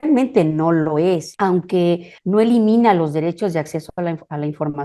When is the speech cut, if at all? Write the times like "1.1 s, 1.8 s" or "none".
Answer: 1.3 s, 2.1 s